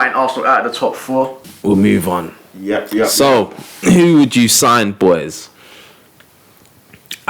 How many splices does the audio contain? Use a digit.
1